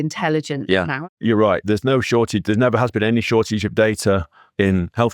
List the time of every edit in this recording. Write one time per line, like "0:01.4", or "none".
0:00.9